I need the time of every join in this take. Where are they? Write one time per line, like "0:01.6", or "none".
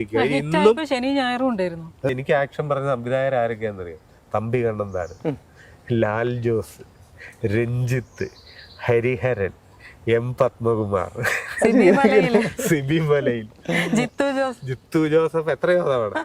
0:02.1

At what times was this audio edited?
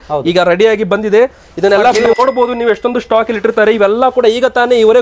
0:02.0

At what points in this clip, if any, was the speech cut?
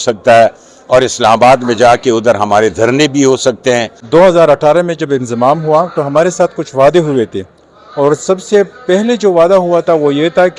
0:03.9

